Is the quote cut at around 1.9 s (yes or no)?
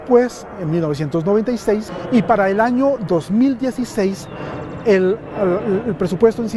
yes